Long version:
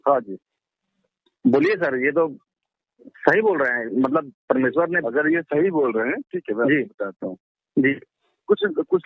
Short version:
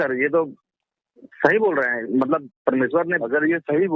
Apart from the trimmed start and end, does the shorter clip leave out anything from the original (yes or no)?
no